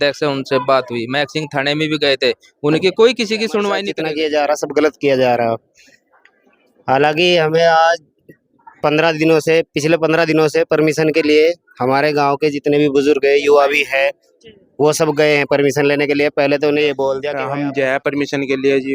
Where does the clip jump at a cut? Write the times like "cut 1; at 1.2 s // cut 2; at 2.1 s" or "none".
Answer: cut 1; at 3.9 s // cut 2; at 17.3 s